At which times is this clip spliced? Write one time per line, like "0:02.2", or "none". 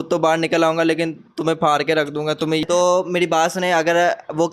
0:02.6

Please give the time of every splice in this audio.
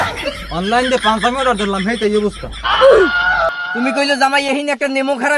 0:03.5

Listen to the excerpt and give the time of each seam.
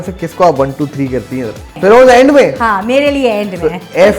0:01.8

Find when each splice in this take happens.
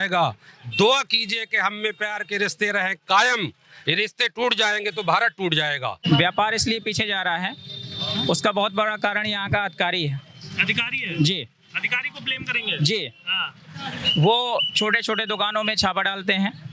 0:06.0

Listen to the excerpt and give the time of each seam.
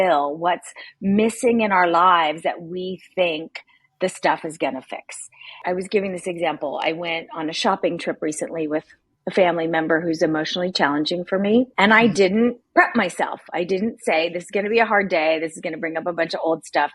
0:05.6
0:11.7

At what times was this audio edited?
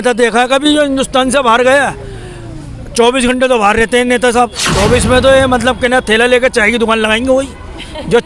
0:04.6

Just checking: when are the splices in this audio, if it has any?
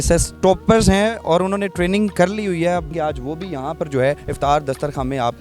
0:02.9
0:04.3

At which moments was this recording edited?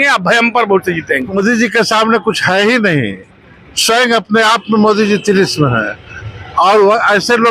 0:01.4

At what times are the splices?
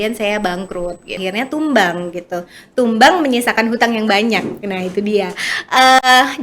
0:01.1

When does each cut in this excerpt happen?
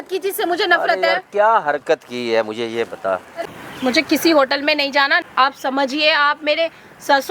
0:03.3
0:05.2

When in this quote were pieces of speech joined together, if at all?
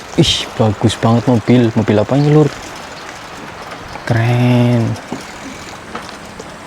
none

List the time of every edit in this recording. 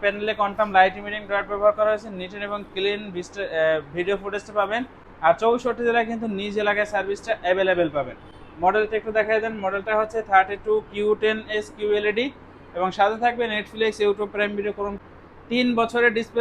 0:15.0

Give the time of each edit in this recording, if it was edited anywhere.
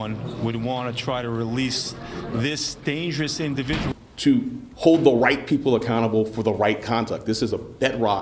0:03.9

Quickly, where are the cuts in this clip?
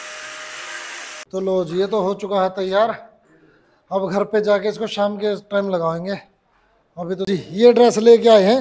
0:01.3
0:07.3

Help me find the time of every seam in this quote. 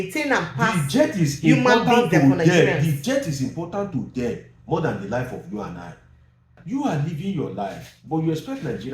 0:06.6

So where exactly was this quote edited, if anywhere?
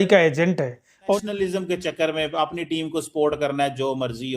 0:01.1

